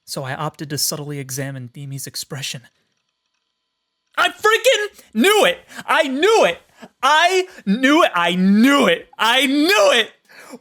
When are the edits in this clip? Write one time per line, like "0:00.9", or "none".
none